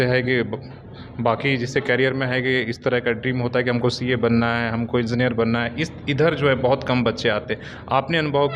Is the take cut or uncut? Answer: uncut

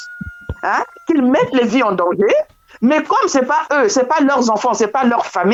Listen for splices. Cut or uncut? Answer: uncut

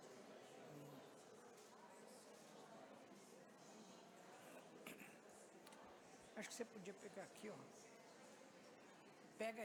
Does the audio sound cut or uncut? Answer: uncut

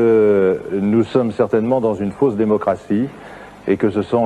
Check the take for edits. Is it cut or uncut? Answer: uncut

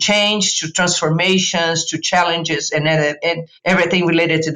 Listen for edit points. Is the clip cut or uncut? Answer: cut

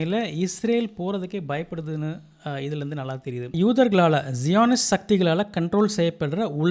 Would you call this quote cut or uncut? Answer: cut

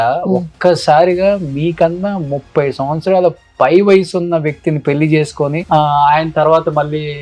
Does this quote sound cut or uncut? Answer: uncut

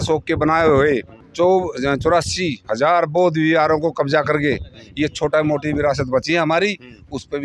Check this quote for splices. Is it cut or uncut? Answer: uncut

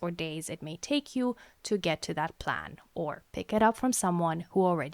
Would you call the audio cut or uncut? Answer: uncut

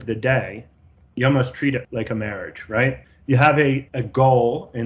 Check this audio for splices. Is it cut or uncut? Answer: cut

